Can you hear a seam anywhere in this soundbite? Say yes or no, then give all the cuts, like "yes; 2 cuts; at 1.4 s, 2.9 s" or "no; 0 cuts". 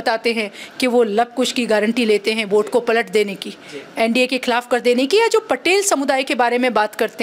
no; 0 cuts